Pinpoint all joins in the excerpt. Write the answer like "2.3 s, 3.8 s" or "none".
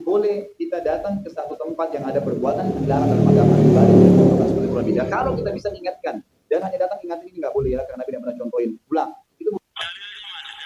9.5 s